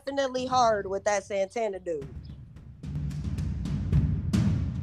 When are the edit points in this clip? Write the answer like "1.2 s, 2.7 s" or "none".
2.1 s